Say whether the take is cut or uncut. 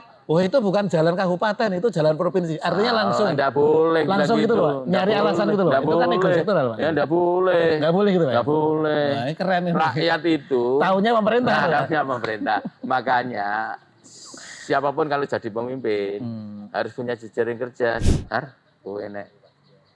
cut